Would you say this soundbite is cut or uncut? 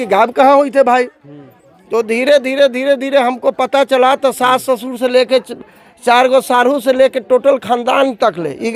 uncut